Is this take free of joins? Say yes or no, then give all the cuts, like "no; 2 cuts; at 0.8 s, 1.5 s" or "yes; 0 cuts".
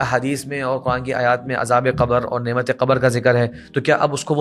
yes; 0 cuts